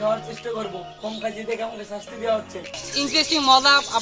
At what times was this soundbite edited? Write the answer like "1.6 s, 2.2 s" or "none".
2.8 s